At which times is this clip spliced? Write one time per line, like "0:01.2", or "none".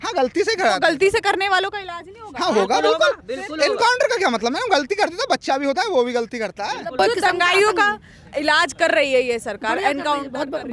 0:07.0